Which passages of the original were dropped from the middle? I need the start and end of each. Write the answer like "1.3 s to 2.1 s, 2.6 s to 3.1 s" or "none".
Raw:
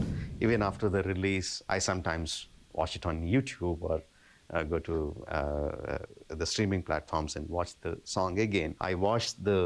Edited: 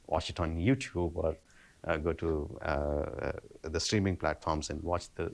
none

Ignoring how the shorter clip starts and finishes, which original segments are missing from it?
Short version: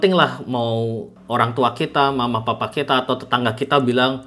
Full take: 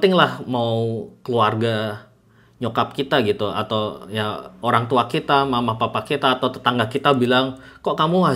1.1 s to 4.5 s

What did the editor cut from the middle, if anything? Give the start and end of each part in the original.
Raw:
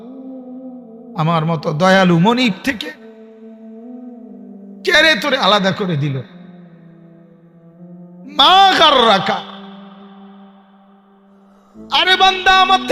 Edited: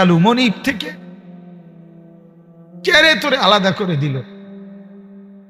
6.4 s to 9.5 s

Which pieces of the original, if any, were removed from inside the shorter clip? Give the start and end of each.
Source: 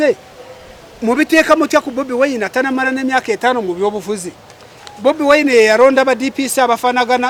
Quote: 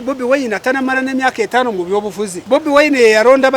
4.3 s to 4.9 s

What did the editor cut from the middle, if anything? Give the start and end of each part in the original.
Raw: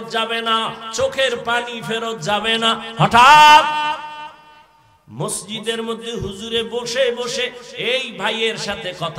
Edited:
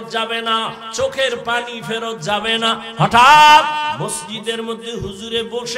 4.0 s to 5.2 s

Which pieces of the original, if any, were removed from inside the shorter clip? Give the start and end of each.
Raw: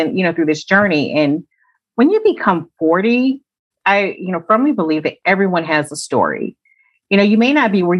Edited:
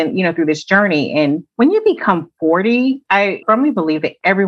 1.5 s to 1.9 s, 3.8 s to 4.4 s

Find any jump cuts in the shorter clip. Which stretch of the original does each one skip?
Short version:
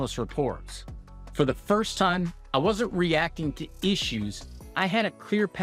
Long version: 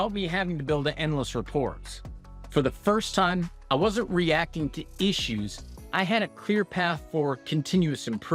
none

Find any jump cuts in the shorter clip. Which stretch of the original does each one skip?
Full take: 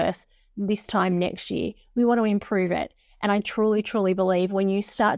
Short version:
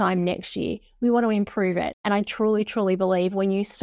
2.9 s to 3.1 s

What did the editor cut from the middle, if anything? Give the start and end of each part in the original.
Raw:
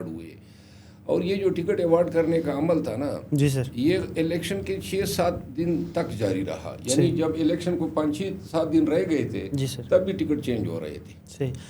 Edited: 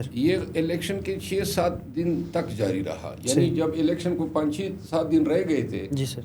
none

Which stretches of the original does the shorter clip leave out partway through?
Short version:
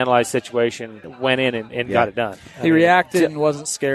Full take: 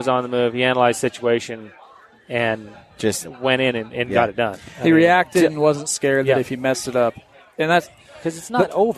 1.8 s to 3.3 s

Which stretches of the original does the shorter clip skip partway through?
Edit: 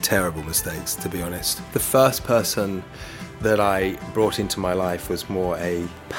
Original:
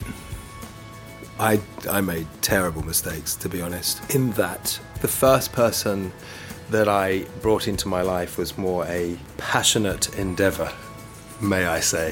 3.9 s to 4.8 s

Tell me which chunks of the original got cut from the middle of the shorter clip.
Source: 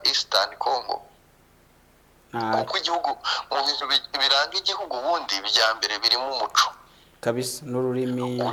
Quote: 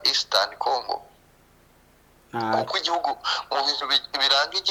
none

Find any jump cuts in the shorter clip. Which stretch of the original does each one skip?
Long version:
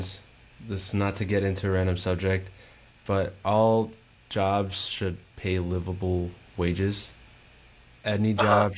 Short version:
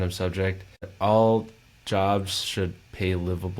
2.8 s to 3.4 s

